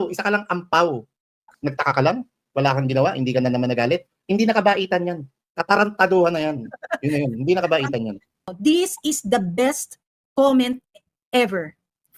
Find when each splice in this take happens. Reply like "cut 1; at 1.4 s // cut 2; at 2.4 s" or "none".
cut 1; at 1.5 s // cut 2; at 8.4 s